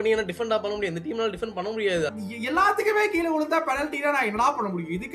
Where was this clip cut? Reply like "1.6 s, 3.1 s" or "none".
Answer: 2.1 s